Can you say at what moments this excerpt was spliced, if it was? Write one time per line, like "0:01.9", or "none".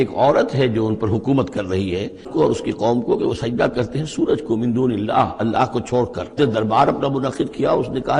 0:02.3
0:06.3